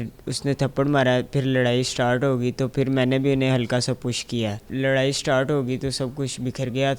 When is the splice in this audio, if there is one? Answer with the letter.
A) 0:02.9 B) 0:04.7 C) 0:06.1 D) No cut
B